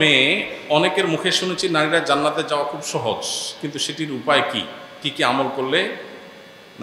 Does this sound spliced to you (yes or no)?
no